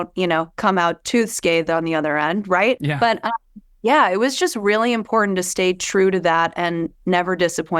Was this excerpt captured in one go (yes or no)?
no